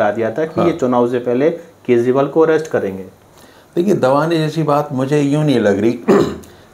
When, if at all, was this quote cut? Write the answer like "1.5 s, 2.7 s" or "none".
none